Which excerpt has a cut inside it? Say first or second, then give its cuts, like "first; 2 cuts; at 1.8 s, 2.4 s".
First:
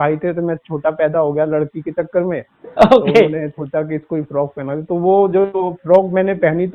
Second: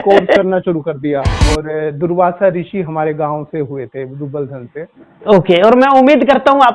second; 1 cut; at 1.4 s